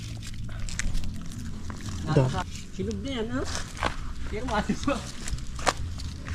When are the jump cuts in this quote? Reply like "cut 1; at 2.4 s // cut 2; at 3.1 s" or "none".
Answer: cut 1; at 2.5 s

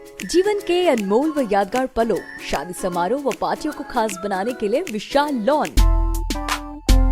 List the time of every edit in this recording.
cut 1; at 5.8 s

